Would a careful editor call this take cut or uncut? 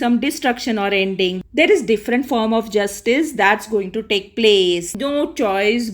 cut